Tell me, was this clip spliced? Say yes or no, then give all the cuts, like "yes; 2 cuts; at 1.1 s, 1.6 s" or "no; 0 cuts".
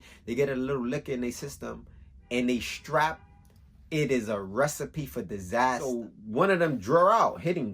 yes; 1 cut; at 5.8 s